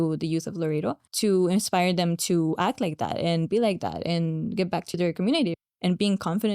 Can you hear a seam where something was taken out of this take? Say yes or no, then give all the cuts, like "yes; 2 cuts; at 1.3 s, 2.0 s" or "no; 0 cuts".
yes; 2 cuts; at 1.1 s, 5.6 s